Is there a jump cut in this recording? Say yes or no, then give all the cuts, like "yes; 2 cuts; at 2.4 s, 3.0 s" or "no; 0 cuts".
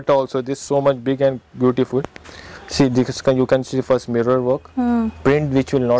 no; 0 cuts